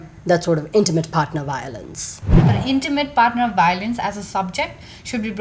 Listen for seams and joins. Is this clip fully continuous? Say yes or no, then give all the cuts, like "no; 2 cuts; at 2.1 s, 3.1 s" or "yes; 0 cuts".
no; 1 cut; at 2.4 s